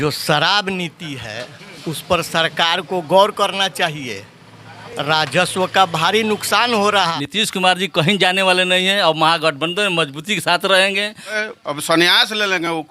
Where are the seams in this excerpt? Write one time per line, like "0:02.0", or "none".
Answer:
0:07.0
0:11.4